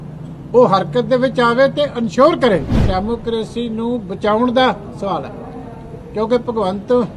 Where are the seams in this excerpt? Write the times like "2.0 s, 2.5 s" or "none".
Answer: 2.8 s